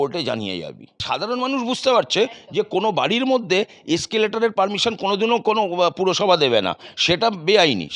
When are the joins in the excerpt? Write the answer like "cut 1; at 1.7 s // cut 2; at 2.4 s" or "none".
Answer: cut 1; at 1.0 s